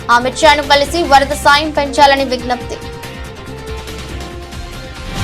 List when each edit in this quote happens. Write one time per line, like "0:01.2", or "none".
0:03.7

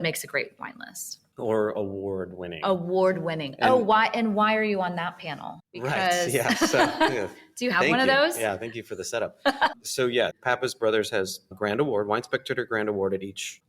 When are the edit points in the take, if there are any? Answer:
0:10.4
0:11.5

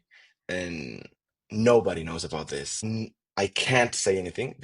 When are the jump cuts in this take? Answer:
0:02.8

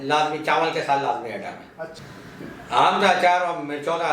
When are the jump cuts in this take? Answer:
0:02.0

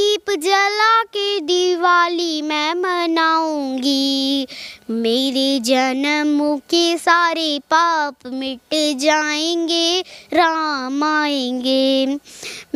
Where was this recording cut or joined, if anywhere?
none

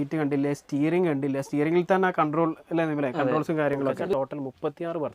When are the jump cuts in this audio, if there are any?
0:04.1

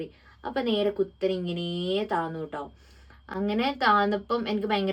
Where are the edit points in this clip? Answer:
none

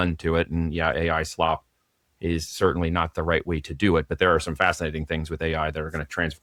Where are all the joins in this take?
none

